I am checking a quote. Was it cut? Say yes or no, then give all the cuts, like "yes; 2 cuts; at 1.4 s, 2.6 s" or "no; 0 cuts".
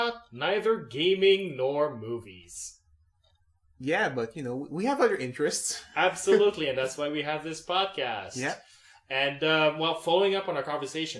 yes; 1 cut; at 9.4 s